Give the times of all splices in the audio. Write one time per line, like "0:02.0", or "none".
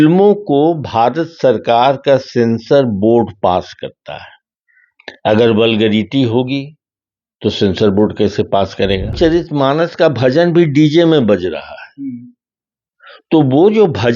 0:09.1